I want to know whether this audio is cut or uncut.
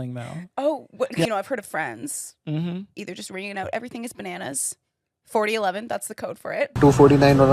cut